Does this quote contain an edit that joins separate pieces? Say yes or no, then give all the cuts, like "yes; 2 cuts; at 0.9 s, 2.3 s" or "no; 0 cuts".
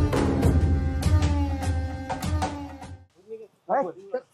yes; 1 cut; at 3.0 s